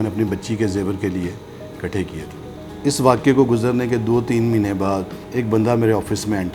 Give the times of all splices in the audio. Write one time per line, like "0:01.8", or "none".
0:02.6